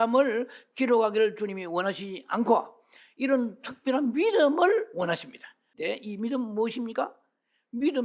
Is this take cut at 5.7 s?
yes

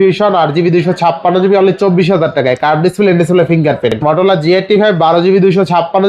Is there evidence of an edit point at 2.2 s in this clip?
no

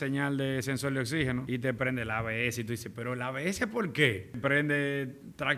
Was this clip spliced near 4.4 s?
yes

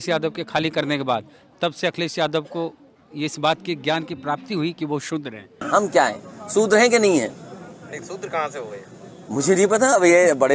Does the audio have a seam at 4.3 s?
no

